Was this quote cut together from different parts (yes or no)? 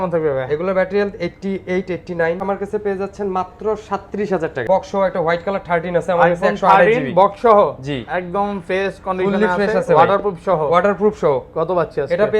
yes